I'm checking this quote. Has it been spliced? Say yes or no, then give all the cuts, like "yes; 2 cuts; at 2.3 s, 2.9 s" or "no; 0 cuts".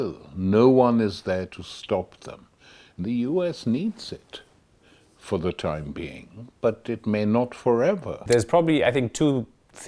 yes; 1 cut; at 8.2 s